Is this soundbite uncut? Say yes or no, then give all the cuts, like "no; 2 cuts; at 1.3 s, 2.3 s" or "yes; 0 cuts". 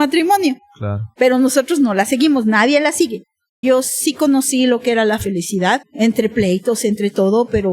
no; 2 cuts; at 3.6 s, 5.9 s